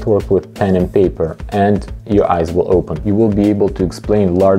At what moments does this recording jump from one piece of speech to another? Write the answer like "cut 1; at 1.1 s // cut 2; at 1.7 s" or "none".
cut 1; at 3.0 s